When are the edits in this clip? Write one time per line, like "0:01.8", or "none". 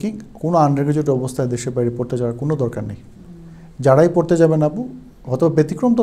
none